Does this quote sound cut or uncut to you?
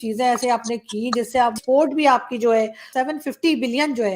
cut